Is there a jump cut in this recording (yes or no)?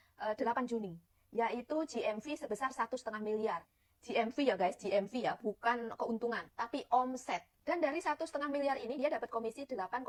no